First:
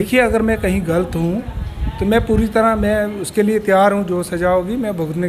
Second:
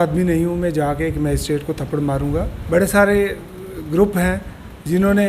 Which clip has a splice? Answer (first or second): second